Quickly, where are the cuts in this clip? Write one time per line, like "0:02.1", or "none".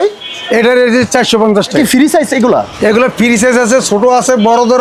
0:01.8